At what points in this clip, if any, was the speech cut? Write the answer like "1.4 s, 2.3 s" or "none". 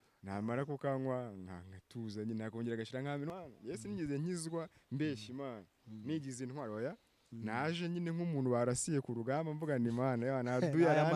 3.3 s